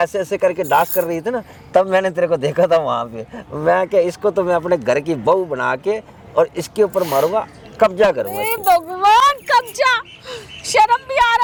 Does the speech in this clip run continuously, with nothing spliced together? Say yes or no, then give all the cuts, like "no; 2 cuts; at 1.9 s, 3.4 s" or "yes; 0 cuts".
yes; 0 cuts